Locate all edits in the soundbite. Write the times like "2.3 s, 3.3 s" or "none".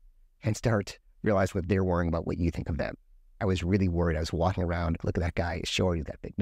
3.3 s, 5.0 s